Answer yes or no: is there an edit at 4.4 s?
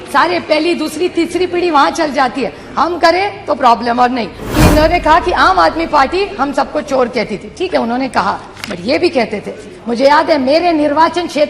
yes